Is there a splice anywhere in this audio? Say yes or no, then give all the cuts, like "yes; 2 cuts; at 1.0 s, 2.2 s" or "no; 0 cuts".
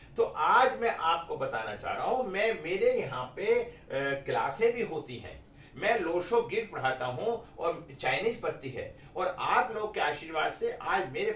no; 0 cuts